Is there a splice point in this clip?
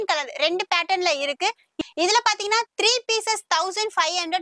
yes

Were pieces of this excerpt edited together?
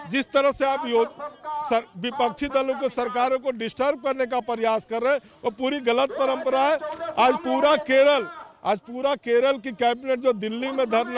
no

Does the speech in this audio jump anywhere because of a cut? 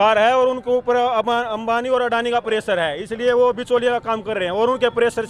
no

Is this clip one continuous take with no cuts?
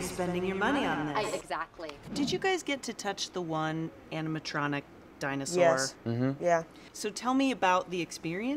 no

